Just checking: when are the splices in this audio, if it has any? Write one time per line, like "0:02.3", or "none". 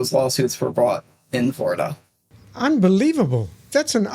none